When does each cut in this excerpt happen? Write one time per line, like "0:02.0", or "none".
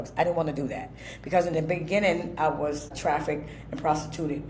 0:02.9